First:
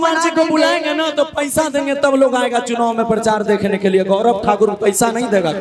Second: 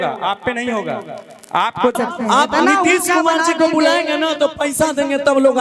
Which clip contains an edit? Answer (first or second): second